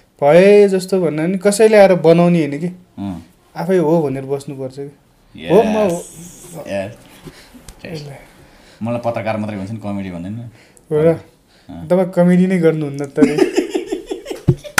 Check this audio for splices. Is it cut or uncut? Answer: uncut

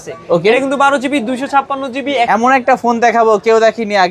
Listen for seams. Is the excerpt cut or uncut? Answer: cut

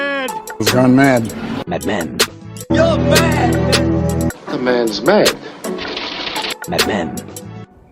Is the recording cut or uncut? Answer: uncut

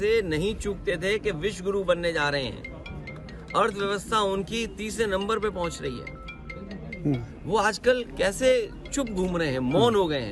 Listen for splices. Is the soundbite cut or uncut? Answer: uncut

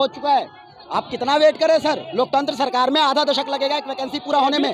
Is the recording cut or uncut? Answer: uncut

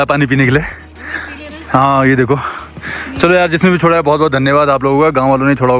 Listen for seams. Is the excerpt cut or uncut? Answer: uncut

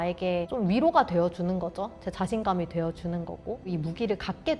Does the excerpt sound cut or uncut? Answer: cut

